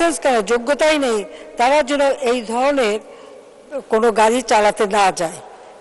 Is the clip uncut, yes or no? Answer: yes